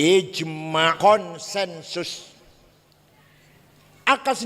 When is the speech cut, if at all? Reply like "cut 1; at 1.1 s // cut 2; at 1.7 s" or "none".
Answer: cut 1; at 0.9 s